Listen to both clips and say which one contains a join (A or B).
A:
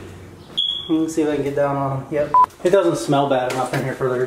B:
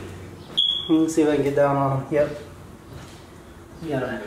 A